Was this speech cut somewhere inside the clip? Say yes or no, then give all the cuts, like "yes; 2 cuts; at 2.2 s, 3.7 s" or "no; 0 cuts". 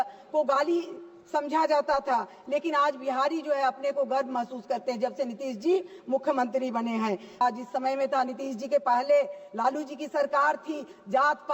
yes; 1 cut; at 7.4 s